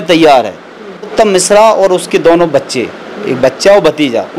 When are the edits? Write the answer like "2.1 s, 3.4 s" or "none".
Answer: 1.1 s